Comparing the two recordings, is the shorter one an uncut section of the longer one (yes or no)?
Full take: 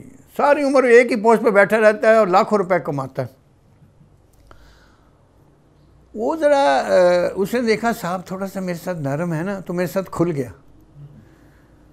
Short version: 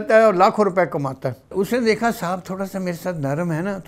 no